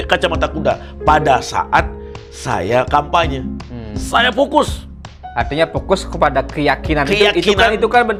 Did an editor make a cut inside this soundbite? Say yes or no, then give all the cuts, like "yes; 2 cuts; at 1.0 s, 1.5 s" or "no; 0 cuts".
no; 0 cuts